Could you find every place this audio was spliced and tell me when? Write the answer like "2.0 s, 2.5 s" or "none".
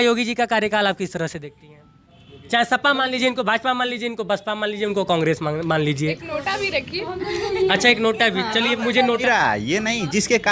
2.3 s, 9.2 s